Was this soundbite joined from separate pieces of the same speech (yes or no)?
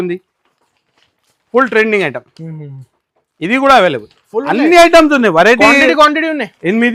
no